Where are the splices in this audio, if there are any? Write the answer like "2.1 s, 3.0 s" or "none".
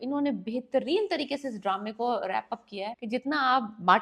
2.9 s

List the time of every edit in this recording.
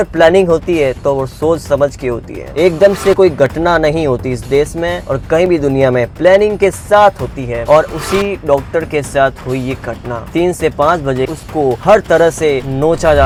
none

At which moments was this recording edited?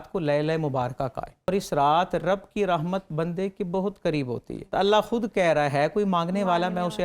1.5 s, 4.7 s

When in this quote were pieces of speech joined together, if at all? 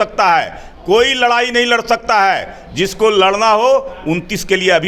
none

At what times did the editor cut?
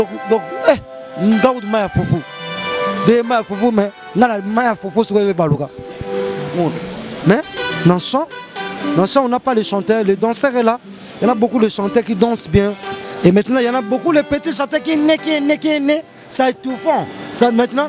12.9 s

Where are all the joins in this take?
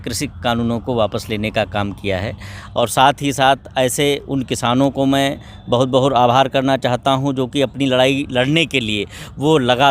2.6 s

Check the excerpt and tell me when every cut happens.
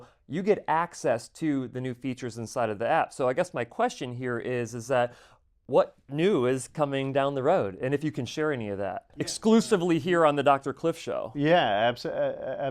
9.4 s

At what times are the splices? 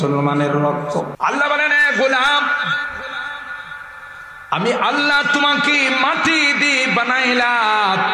1.1 s

